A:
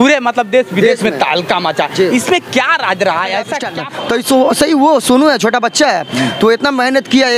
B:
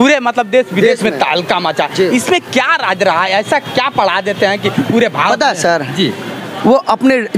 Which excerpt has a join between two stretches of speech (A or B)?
A